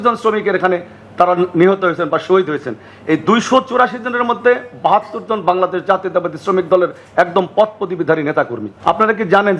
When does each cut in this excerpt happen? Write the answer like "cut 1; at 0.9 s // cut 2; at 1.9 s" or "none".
cut 1; at 8.7 s